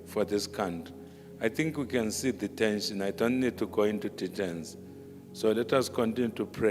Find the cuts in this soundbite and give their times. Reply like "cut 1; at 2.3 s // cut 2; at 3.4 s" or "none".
none

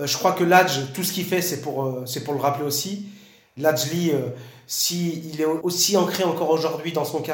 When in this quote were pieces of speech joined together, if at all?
cut 1; at 5.6 s

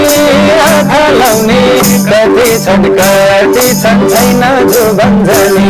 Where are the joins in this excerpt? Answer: none

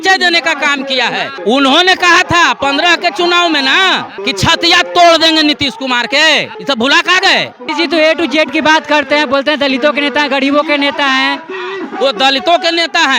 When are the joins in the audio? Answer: cut 1; at 1.3 s // cut 2; at 4.1 s // cut 3; at 6.5 s // cut 4; at 7.6 s

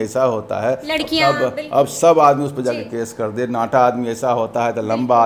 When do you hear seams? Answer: none

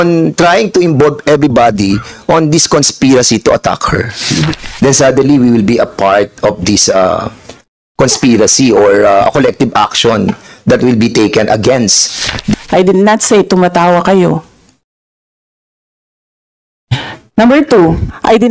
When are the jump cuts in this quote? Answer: cut 1; at 4.6 s // cut 2; at 12.5 s

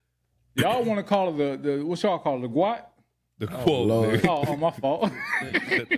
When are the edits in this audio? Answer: none

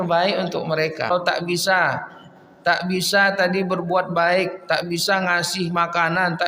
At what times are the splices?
cut 1; at 1.1 s

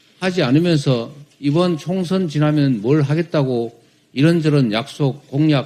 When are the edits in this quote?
none

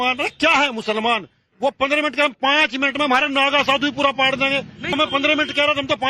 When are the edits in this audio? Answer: cut 1; at 4.9 s

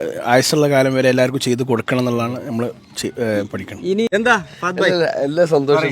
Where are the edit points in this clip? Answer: cut 1; at 4.1 s

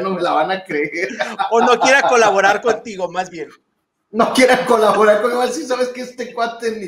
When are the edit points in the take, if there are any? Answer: none

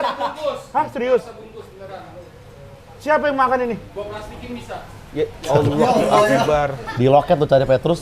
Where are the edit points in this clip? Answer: cut 1; at 6.9 s

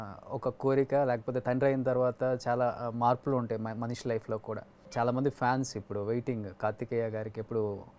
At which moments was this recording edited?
cut 1; at 4.8 s

